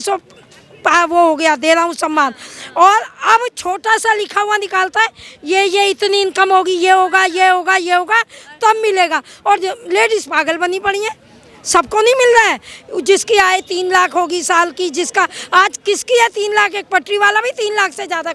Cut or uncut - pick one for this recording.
uncut